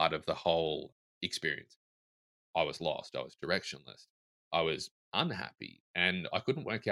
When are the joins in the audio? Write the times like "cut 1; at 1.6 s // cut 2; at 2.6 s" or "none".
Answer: cut 1; at 1.0 s // cut 2; at 2.2 s